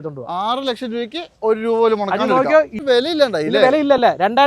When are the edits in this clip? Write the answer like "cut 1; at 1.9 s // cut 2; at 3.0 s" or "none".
cut 1; at 2.8 s